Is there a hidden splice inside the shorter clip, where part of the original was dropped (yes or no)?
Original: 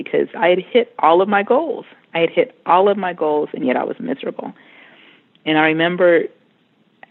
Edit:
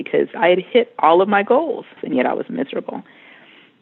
yes